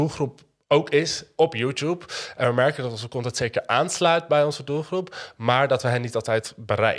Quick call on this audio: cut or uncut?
uncut